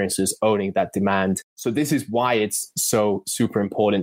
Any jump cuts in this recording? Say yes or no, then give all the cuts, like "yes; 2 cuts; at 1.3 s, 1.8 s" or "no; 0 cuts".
yes; 1 cut; at 1.5 s